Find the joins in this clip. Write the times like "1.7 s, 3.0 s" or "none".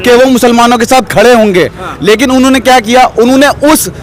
none